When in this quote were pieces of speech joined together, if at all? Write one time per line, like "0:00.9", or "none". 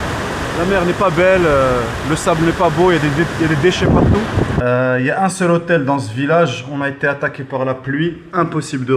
0:04.6